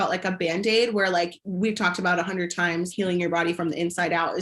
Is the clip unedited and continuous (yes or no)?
no